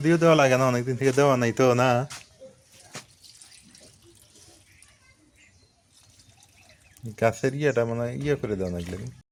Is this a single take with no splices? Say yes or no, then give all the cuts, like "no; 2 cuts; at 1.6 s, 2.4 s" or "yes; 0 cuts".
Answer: yes; 0 cuts